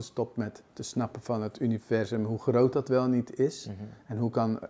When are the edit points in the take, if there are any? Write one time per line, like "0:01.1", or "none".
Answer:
none